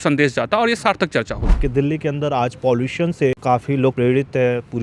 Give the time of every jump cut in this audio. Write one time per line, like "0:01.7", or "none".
0:01.6
0:04.0